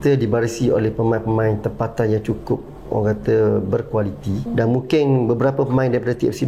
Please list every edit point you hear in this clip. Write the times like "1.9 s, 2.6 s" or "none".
4.4 s